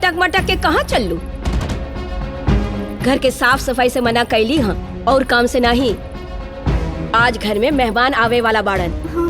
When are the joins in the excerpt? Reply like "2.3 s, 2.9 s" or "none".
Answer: none